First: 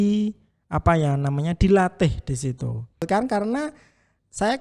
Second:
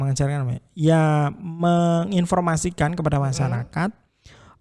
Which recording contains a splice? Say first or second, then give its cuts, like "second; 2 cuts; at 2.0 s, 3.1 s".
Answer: first; 1 cut; at 3.0 s